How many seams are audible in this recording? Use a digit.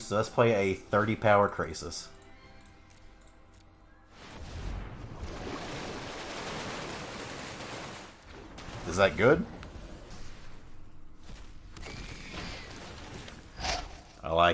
1